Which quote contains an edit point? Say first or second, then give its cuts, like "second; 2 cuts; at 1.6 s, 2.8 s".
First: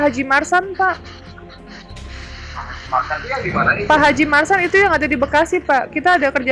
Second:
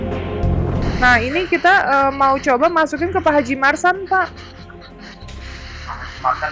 second; 1 cut; at 1.0 s